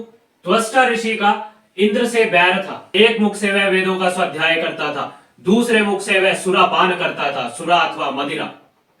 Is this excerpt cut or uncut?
cut